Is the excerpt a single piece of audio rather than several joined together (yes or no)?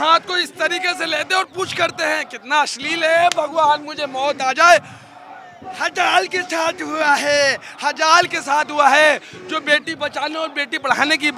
yes